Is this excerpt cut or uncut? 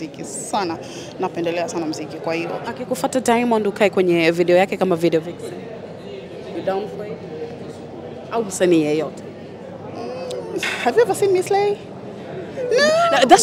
cut